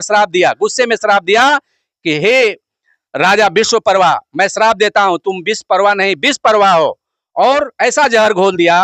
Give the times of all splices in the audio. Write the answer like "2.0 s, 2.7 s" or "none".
none